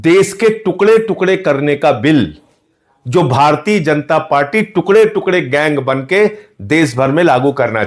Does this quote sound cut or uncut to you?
uncut